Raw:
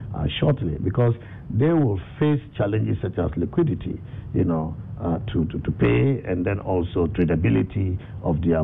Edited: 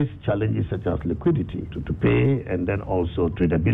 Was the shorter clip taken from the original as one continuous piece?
no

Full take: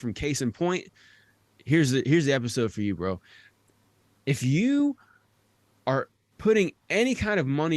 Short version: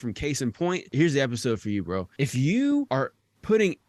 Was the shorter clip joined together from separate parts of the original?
yes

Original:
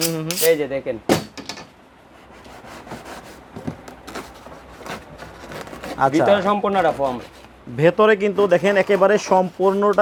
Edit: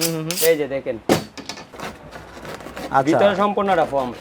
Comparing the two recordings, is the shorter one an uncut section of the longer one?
no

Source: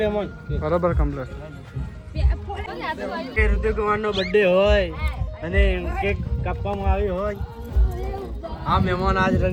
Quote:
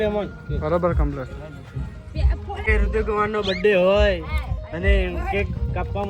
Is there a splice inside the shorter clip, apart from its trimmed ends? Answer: yes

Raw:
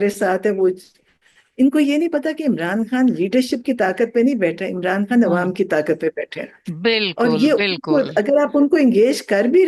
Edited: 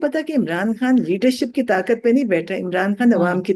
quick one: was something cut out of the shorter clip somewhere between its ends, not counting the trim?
no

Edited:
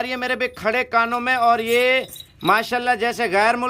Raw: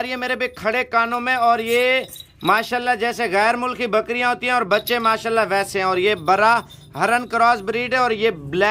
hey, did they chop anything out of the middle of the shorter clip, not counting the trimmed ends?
no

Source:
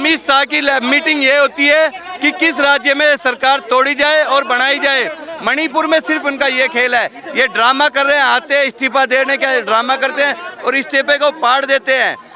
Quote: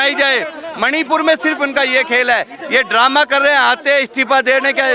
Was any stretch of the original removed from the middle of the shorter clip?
no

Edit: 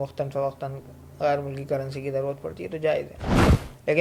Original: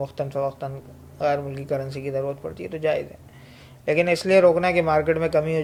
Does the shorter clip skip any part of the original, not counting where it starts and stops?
no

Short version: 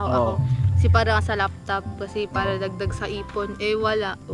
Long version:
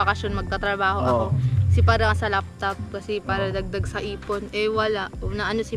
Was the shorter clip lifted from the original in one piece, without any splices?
yes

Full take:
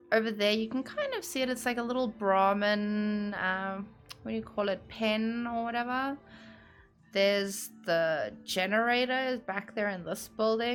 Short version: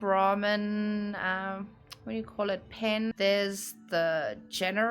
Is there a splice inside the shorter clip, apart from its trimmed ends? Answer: yes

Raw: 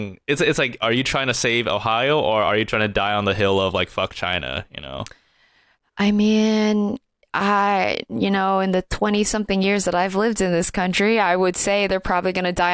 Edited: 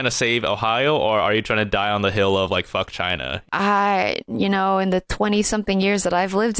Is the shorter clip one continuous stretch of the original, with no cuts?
no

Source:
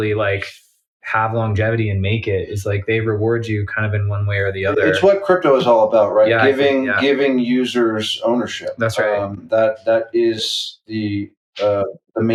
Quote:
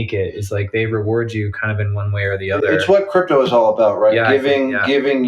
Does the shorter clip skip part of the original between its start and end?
no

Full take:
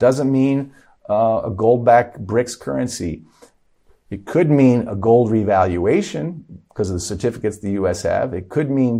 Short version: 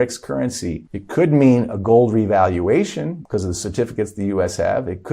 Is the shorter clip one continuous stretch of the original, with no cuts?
no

